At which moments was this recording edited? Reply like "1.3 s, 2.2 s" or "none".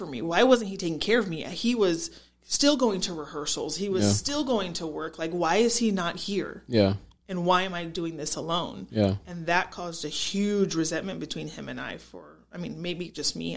none